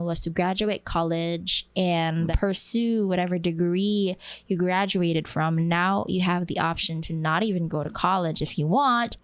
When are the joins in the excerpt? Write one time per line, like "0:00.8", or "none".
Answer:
none